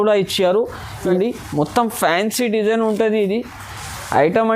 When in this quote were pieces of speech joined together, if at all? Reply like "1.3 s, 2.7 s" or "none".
1.1 s